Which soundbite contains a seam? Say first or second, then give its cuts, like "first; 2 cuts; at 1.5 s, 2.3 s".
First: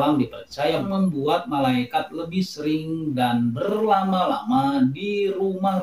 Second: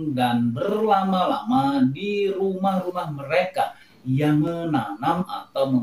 second; 1 cut; at 4.5 s